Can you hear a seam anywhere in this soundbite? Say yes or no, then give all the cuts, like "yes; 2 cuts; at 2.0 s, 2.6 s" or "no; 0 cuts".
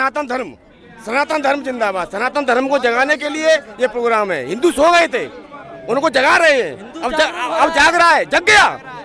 no; 0 cuts